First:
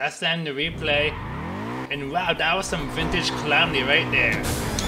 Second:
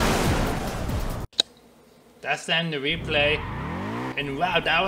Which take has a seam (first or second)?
second